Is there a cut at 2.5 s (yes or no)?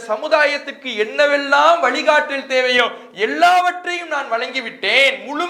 no